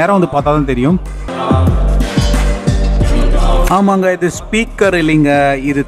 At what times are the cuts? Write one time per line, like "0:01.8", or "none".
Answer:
0:01.3